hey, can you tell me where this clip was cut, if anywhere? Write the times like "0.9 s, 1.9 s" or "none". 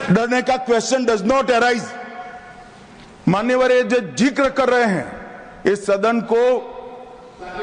none